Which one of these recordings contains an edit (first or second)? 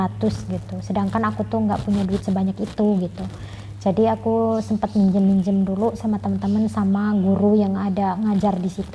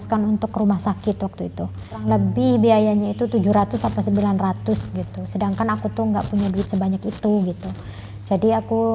second